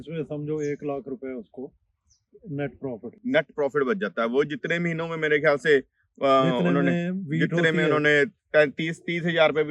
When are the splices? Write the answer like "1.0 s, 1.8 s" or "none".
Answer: none